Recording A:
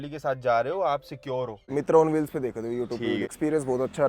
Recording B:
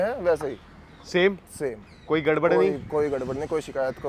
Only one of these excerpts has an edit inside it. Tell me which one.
A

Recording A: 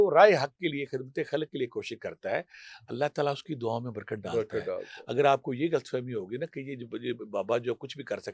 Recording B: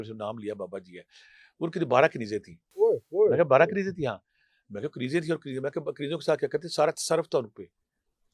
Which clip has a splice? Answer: B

